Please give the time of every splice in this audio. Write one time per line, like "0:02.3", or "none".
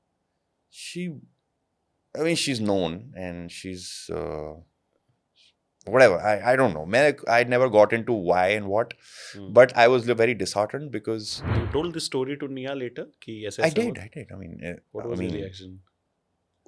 0:11.6

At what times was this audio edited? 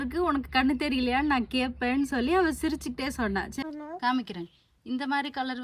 0:03.6

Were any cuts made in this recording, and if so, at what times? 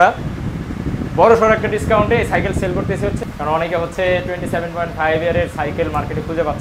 0:03.3

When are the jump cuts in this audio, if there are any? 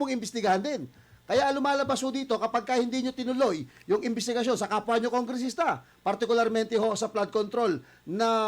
0:01.0

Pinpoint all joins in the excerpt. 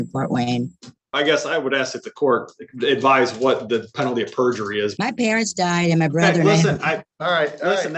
0:01.1
0:04.9

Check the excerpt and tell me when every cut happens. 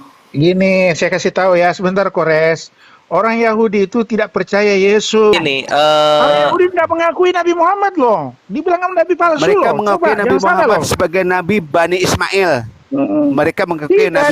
0:05.3

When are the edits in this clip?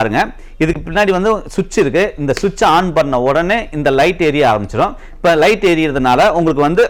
none

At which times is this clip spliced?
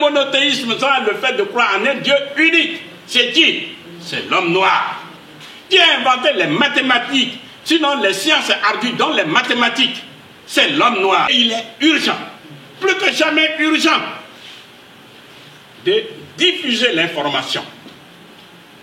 0:11.3

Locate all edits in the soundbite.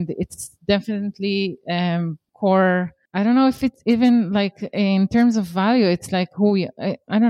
0:02.2
0:03.0

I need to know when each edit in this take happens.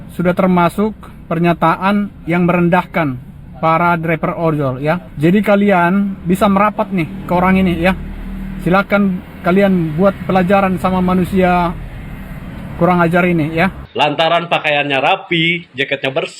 0:05.1
0:13.8

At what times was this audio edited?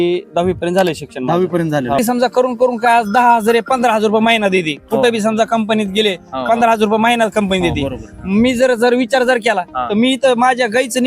0:02.0

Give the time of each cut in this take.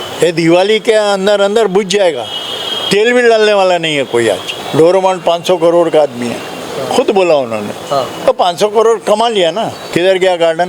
0:04.5
0:09.8

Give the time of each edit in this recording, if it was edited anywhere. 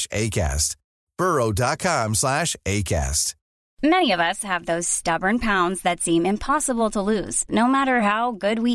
0:03.7

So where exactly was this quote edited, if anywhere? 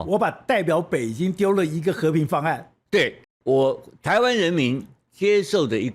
0:03.3

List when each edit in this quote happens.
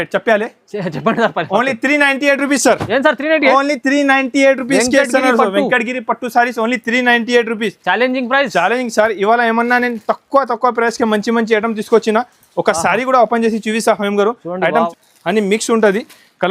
0:14.9

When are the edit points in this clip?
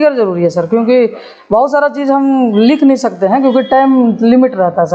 none

